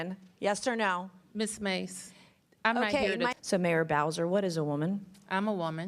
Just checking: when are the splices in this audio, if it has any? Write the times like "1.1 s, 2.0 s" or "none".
3.3 s